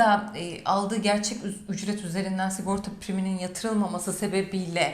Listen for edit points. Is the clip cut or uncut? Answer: uncut